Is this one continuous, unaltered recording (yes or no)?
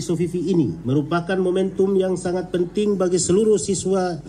yes